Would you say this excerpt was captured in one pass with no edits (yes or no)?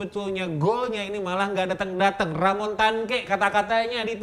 yes